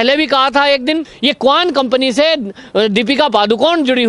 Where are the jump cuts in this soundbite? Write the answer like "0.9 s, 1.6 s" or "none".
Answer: 1.1 s